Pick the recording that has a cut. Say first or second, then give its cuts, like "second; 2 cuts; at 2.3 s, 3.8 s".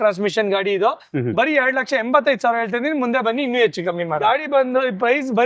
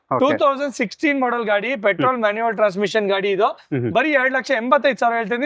first; 1 cut; at 4.2 s